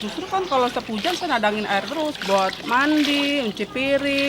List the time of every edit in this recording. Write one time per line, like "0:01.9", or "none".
0:02.2

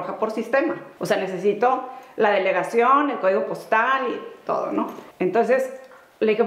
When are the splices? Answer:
0:00.9
0:05.0

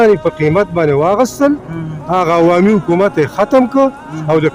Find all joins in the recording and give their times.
none

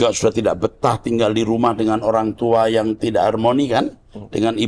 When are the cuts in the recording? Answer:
none

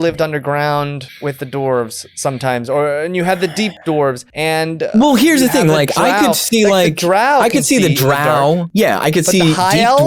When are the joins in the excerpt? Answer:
0:01.0
0:04.0
0:08.7

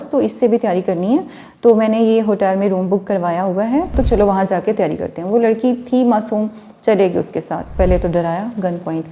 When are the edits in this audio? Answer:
0:04.0
0:07.7

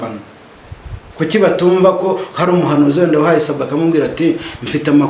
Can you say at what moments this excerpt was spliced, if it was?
none

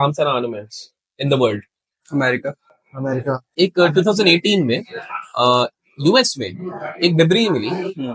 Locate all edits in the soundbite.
0:03.5

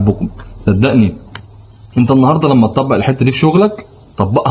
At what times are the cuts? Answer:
none

